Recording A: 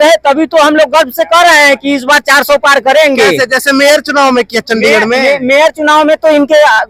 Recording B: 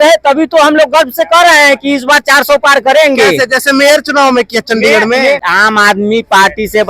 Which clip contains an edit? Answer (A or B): B